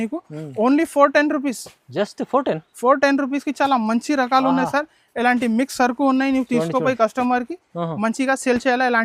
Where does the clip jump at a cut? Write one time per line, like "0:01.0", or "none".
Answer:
none

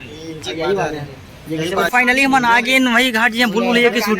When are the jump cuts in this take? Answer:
0:01.9

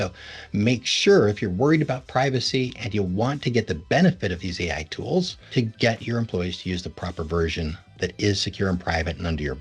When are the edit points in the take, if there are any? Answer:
0:05.4

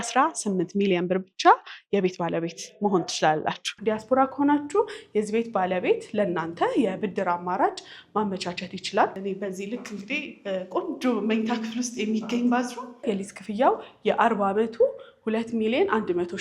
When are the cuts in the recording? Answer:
0:03.7
0:09.2
0:13.0

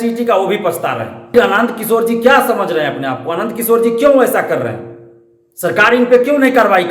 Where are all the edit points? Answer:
0:01.3

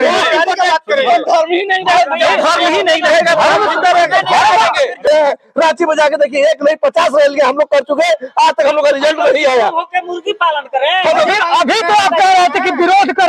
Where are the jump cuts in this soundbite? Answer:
0:05.1

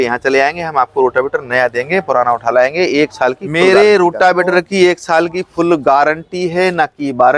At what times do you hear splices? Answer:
0:03.5

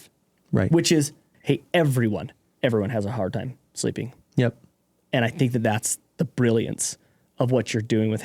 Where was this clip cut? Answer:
0:01.3
0:02.4

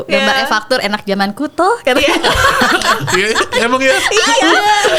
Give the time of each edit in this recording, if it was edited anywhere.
none

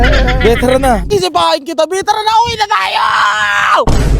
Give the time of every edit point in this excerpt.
0:01.0

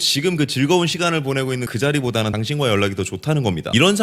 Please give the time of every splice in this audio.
none

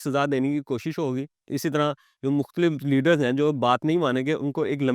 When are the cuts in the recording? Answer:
none

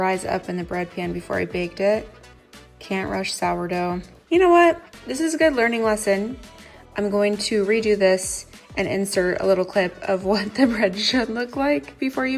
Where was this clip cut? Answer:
0:04.1

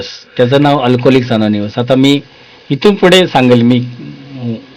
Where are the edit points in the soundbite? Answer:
none

